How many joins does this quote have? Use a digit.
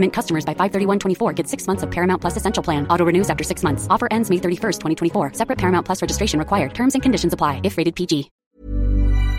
1